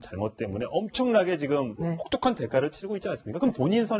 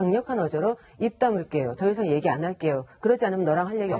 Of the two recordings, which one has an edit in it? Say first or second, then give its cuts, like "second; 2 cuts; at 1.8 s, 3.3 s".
second; 1 cut; at 2.0 s